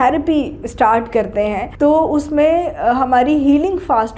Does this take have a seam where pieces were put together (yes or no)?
yes